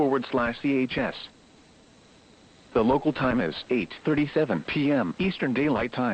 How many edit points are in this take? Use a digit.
1